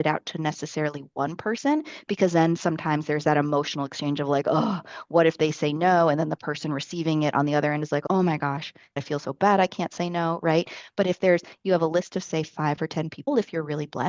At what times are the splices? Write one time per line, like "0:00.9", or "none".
none